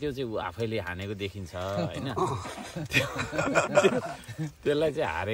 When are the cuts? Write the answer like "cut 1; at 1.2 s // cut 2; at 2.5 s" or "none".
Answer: none

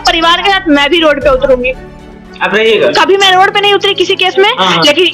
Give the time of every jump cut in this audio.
none

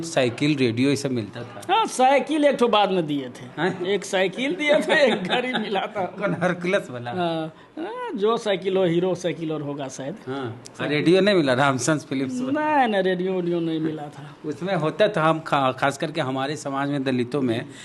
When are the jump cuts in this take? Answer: none

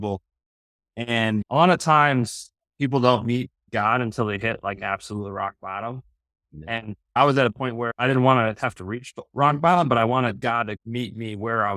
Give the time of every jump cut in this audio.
cut 1; at 1.4 s // cut 2; at 7.9 s

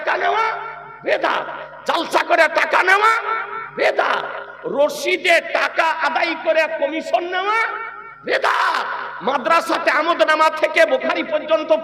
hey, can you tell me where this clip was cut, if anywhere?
none

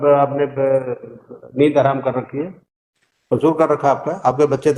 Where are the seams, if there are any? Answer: none

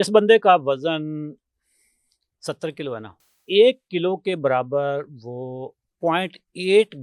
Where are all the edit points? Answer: cut 1; at 3.2 s

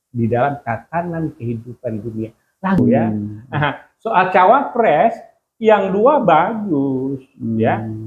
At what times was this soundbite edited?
cut 1; at 2.8 s

